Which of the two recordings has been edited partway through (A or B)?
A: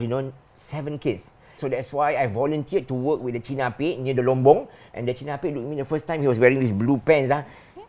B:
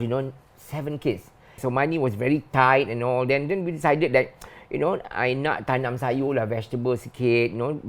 A